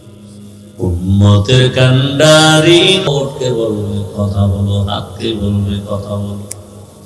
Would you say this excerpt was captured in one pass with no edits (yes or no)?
no